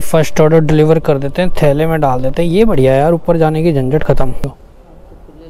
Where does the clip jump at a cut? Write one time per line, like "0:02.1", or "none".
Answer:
0:04.5